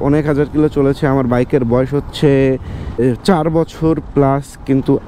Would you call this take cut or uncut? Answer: cut